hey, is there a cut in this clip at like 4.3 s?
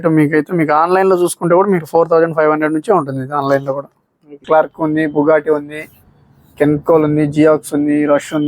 yes; 1 cut; at 4.3 s

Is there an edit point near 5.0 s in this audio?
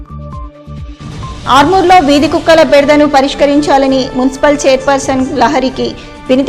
no; 1 cut; at 1.0 s

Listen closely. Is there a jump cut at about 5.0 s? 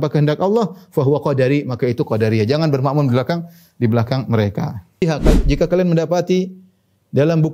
yes; 1 cut; at 5.0 s

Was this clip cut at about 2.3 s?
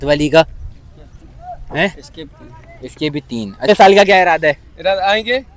no; 1 cut; at 3.7 s

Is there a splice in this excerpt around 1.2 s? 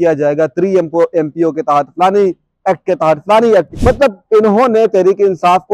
no; 1 cut; at 3.7 s

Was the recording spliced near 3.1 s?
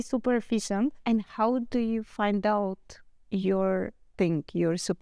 no; 1 cut; at 1.0 s

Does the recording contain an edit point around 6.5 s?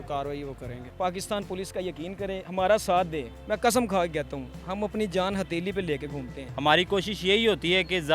yes; 2 cuts; at 0.9 s, 6.5 s

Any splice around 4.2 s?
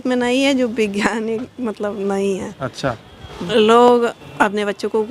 yes; 2 cuts; at 3.3 s, 4.2 s

